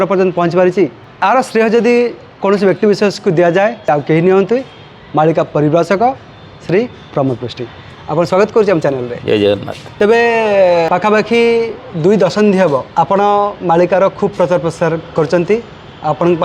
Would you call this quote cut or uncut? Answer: cut